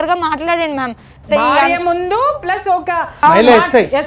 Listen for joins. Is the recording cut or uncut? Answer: cut